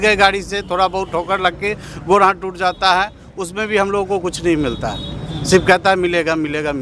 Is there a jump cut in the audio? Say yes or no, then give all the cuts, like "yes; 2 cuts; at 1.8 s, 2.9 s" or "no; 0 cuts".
no; 0 cuts